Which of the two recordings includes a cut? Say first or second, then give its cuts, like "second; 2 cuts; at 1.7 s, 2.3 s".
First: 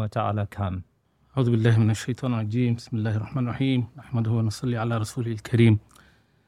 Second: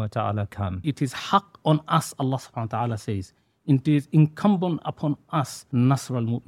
second; 2 cuts; at 0.8 s, 5.6 s